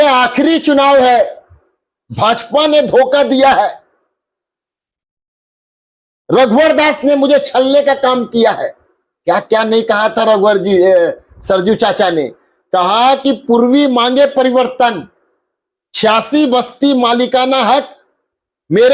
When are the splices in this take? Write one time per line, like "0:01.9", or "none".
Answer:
none